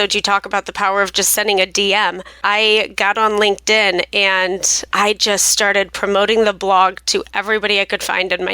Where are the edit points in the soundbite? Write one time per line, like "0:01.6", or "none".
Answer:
0:02.3
0:04.9